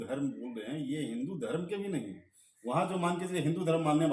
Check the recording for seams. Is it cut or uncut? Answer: uncut